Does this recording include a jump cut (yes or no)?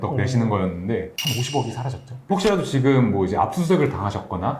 yes